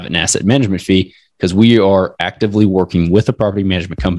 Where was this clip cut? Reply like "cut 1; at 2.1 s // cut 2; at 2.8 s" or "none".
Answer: none